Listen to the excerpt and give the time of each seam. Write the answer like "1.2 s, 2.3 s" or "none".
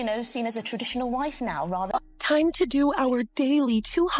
1.9 s